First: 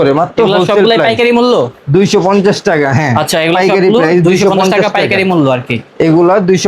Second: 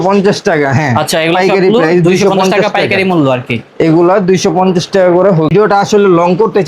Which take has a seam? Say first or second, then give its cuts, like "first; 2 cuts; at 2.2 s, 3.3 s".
second; 1 cut; at 5.5 s